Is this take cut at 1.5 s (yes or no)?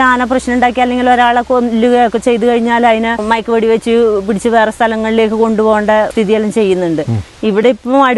no